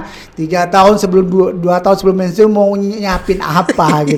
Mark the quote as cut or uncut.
uncut